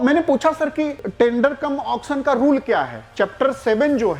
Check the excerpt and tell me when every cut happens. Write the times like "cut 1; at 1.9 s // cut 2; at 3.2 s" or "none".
cut 1; at 1.0 s